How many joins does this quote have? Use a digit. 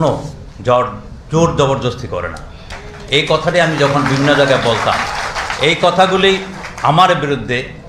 1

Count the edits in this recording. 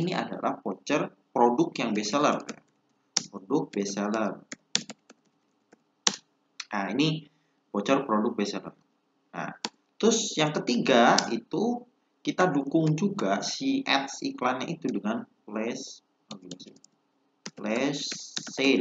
0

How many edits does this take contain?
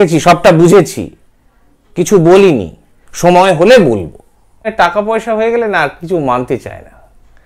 1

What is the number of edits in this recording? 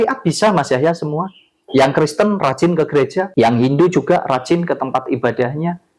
1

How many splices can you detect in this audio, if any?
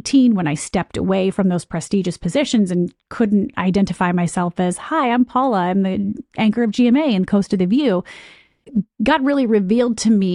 1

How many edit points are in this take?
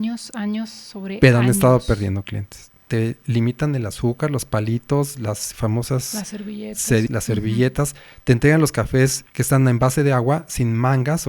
3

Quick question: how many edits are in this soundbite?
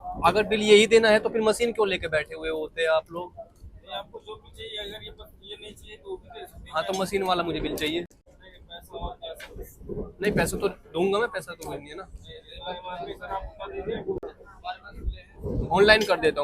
0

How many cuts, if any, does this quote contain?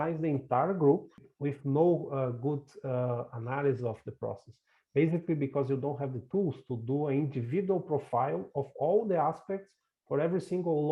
1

